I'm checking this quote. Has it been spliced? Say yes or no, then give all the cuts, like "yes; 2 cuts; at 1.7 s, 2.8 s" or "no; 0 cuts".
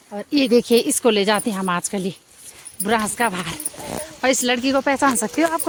no; 0 cuts